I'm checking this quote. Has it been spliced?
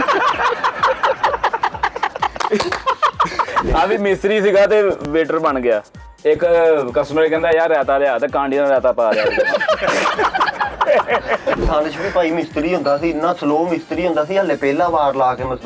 yes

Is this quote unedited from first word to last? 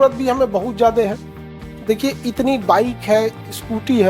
yes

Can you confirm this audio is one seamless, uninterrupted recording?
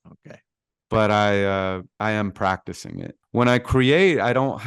no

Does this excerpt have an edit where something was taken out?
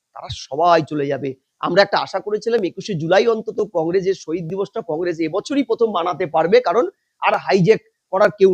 no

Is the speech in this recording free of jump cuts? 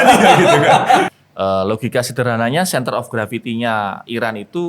no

